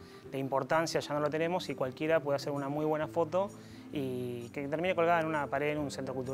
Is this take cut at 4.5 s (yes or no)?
yes